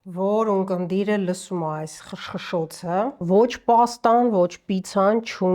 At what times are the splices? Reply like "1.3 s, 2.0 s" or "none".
3.2 s